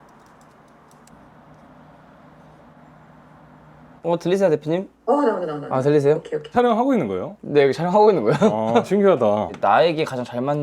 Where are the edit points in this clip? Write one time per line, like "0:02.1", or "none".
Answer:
0:01.1
0:04.0